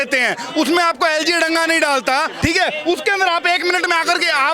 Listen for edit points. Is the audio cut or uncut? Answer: cut